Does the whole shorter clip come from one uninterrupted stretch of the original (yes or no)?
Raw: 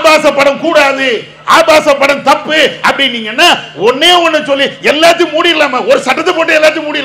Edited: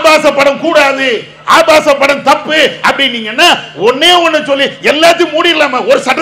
yes